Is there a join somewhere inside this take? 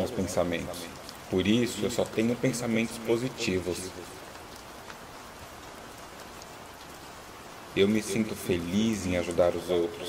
yes; 2 cuts; at 4.4 s, 7.7 s

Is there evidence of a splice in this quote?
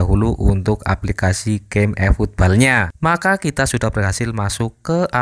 yes; 1 cut; at 2.9 s

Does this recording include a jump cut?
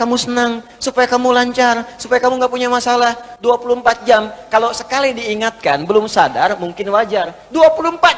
no; 0 cuts

